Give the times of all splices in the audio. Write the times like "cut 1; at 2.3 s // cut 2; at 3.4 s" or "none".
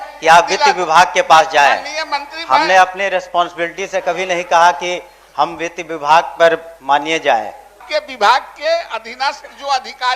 cut 1; at 7.8 s